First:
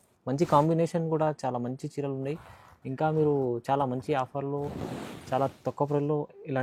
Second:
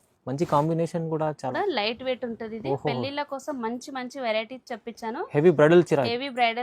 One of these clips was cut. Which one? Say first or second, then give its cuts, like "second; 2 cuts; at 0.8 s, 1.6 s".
second; 1 cut; at 1.5 s